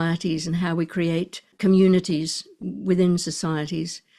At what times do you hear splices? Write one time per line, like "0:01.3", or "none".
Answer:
0:01.4